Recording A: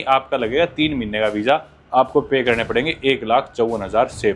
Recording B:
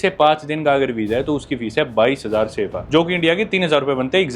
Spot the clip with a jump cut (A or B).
B